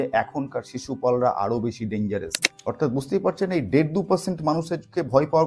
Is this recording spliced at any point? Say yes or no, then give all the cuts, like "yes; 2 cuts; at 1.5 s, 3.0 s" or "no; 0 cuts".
yes; 1 cut; at 2.4 s